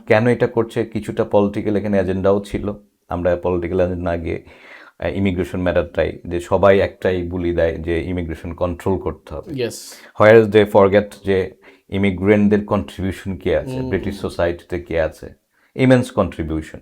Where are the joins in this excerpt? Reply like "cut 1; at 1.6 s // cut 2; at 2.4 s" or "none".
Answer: none